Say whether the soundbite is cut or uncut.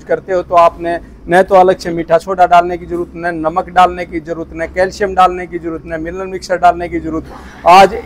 uncut